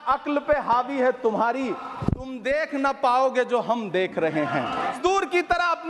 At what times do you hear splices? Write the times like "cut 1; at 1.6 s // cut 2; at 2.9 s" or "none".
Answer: cut 1; at 5.0 s